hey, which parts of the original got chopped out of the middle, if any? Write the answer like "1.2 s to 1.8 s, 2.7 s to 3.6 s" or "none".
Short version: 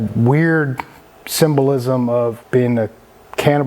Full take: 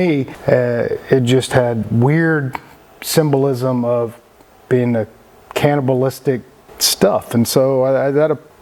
4.2 s to 4.6 s